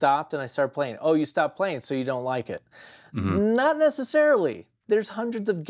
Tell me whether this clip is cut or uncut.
cut